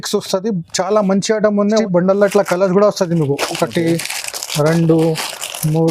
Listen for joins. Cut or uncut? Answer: cut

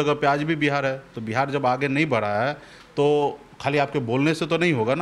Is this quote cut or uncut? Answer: uncut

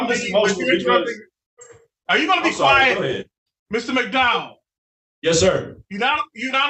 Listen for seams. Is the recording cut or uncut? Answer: uncut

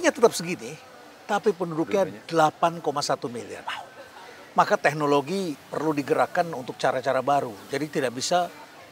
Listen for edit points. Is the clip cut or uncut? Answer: uncut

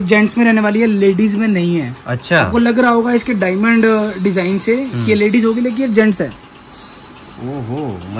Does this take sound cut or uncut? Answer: uncut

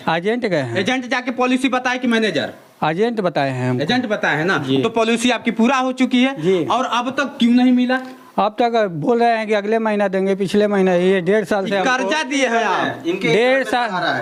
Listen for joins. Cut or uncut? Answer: uncut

